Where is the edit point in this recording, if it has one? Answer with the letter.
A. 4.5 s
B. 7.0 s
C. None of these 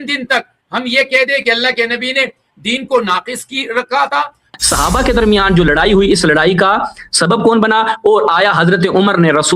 A